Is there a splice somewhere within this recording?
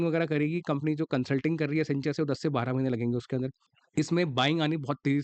yes; 1 cut; at 3.7 s

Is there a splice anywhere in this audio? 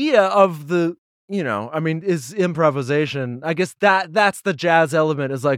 no; 0 cuts

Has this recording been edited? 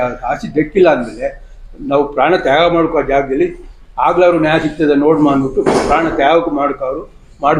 no; 0 cuts

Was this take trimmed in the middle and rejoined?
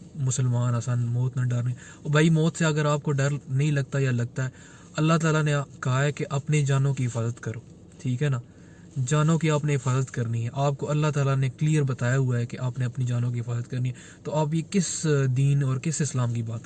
no; 0 cuts

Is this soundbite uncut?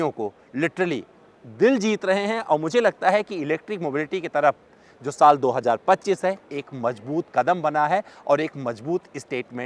yes; 0 cuts

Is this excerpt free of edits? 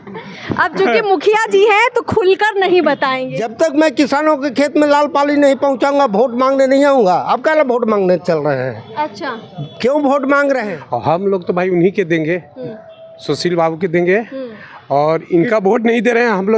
no; 2 cuts; at 3.2 s, 10.7 s

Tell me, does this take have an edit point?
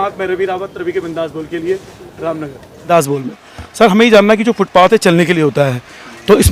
no; 0 cuts

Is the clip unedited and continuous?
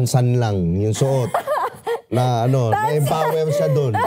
yes; 0 cuts

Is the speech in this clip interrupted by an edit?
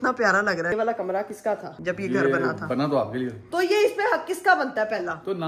yes; 3 cuts; at 0.7 s, 1.7 s, 3.4 s

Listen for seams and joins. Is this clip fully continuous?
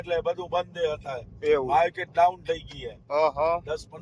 yes; 0 cuts

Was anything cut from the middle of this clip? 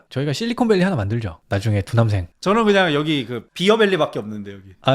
yes; 1 cut; at 2.3 s

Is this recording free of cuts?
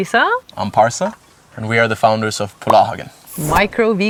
yes; 0 cuts

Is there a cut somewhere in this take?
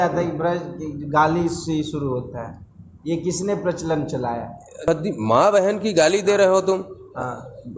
yes; 1 cut; at 4.9 s

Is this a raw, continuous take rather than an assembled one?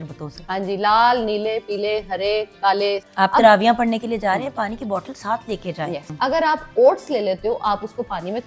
no; 2 cuts; at 3.1 s, 6.1 s

